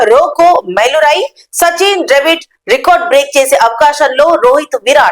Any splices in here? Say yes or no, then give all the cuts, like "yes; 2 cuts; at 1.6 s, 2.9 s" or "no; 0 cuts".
no; 0 cuts